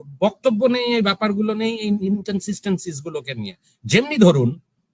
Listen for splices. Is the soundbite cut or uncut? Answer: uncut